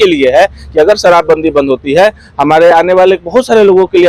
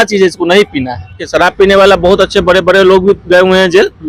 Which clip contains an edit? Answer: second; 1 cut; at 1.3 s

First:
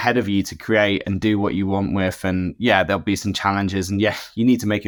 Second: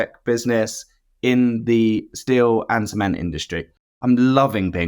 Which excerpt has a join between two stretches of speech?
second; 1 cut; at 3.9 s

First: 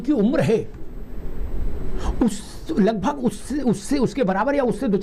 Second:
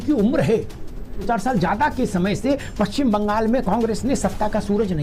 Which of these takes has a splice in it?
second; 1 cut; at 1.3 s

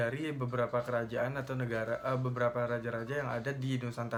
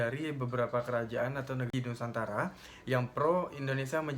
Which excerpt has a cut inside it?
second; 1 cut; at 1.7 s

